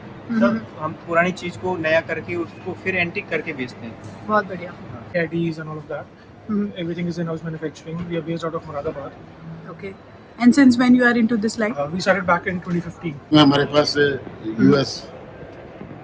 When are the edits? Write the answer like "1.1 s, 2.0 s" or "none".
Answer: 4.9 s, 13.3 s